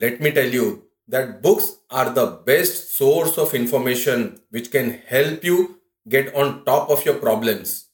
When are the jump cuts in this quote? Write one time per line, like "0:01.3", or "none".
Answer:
0:00.9